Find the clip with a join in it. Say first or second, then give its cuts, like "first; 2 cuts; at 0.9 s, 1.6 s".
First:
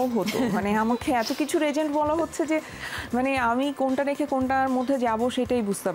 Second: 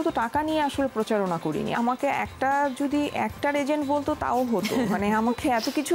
second; 1 cut; at 1.7 s